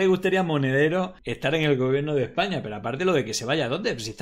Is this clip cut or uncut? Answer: cut